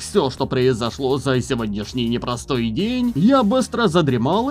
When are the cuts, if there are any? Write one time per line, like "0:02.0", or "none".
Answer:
0:03.1